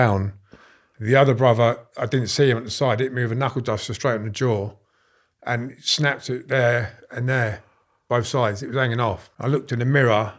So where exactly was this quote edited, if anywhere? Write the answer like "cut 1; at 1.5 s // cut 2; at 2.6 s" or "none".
cut 1; at 9.3 s